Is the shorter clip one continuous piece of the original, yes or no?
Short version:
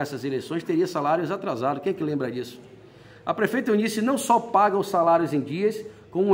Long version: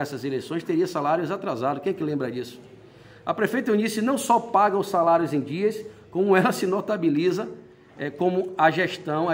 yes